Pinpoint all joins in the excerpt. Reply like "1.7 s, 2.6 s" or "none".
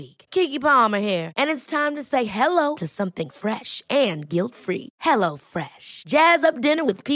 none